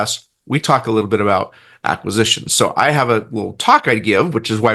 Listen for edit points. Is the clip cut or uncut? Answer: uncut